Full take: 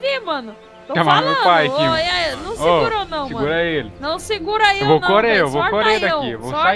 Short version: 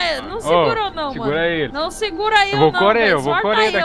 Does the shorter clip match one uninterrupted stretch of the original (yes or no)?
no